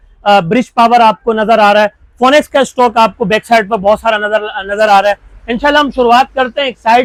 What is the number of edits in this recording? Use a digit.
0